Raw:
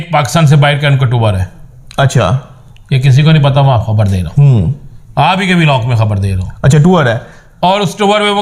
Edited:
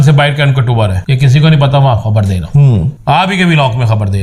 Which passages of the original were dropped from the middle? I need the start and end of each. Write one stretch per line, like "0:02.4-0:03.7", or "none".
0:01.5-0:02.9
0:04.8-0:05.0